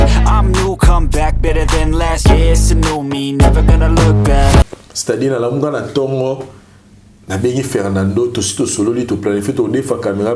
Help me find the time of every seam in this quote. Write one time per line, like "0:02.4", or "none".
0:04.6